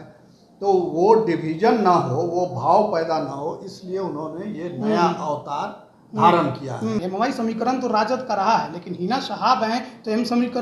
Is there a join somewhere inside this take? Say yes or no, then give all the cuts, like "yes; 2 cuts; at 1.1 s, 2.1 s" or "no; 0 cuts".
yes; 1 cut; at 7.0 s